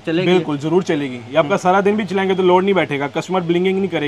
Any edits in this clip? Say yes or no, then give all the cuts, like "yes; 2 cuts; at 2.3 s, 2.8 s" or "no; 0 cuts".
no; 0 cuts